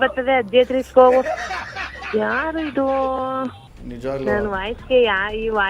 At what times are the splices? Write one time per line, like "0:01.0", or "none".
0:03.7